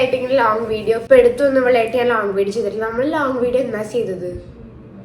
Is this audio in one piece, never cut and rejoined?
no; 1 cut; at 1.0 s

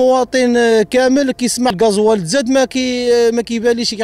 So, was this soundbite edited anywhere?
yes; 1 cut; at 1.7 s

